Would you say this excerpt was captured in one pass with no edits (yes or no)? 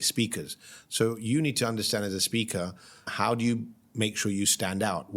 no